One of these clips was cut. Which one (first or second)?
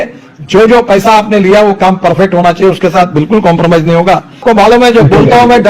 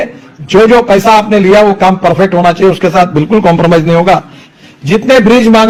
first